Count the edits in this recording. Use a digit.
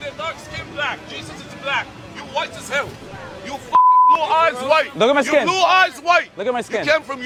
0